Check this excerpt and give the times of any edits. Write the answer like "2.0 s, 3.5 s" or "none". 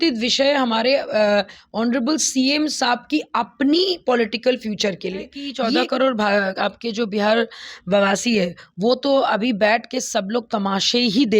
5.4 s

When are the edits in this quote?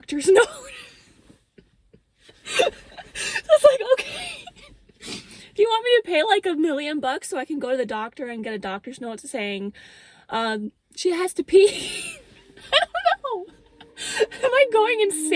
none

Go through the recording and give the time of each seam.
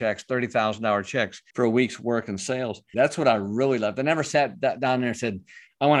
1.4 s, 2.9 s

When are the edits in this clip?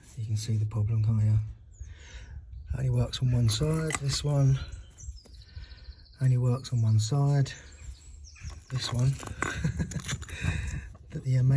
4.0 s, 8.6 s

